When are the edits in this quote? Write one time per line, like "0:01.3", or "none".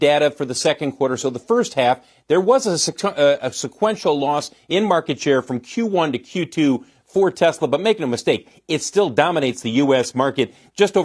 none

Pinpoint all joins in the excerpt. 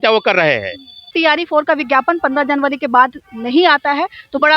0:01.1

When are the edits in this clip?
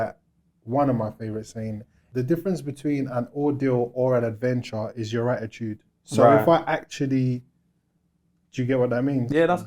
0:01.9

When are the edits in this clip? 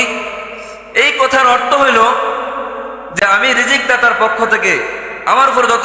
0:03.2

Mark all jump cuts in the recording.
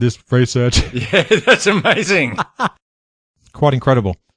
0:03.2

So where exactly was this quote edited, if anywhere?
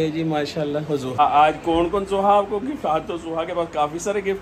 0:01.2

